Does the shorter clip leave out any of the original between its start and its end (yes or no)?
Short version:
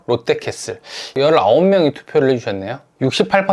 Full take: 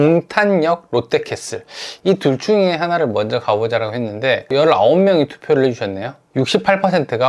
yes